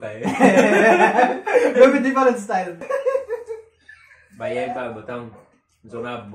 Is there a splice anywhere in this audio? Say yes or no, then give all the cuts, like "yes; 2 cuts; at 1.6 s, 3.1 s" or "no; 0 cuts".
yes; 1 cut; at 2.8 s